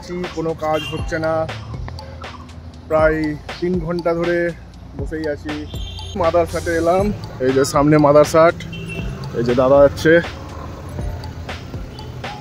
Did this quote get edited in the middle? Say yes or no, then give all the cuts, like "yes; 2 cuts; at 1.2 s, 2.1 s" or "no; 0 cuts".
yes; 1 cut; at 6.1 s